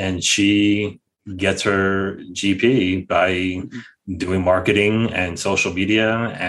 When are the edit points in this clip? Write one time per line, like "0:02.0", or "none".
none